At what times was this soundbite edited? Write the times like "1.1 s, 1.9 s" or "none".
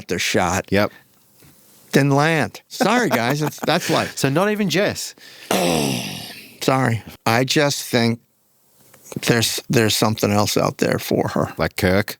2.7 s, 7.1 s